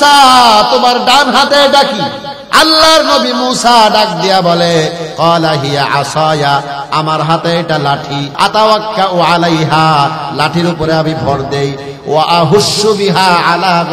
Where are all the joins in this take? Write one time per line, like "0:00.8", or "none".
0:08.3